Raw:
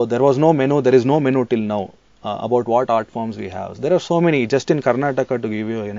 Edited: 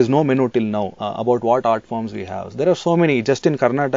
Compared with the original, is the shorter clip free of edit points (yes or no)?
no